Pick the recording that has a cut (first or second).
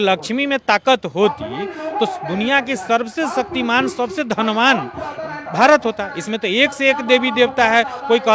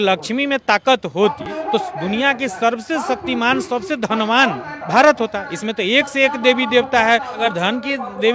second